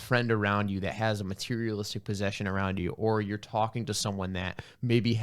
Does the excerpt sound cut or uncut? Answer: uncut